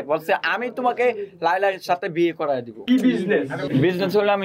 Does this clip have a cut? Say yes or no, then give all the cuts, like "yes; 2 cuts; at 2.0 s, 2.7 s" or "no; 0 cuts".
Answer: yes; 2 cuts; at 2.8 s, 3.7 s